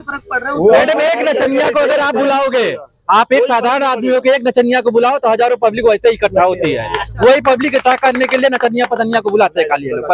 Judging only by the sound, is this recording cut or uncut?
uncut